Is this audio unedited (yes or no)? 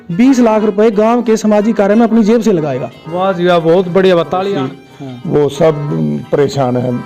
no